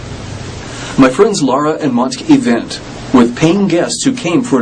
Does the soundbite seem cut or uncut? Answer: uncut